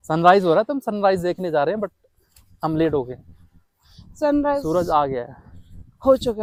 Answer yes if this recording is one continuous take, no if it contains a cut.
yes